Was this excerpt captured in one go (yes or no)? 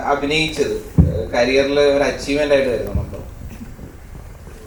yes